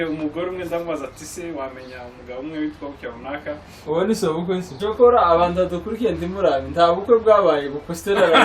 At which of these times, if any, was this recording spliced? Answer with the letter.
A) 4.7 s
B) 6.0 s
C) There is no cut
A